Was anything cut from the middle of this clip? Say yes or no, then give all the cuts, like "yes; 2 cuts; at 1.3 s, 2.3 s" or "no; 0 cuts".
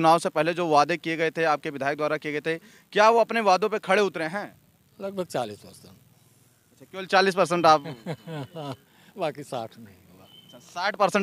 no; 0 cuts